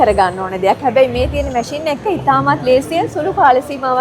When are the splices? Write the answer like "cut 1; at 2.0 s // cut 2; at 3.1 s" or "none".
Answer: none